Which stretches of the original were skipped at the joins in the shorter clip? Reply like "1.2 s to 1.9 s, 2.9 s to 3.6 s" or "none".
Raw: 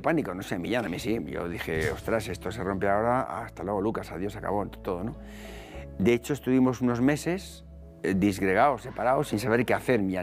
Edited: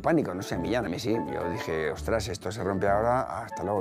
none